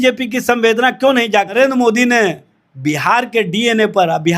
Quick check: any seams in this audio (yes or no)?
yes